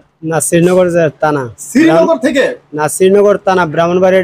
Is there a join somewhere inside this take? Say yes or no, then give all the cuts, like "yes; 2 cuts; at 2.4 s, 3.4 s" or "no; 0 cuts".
no; 0 cuts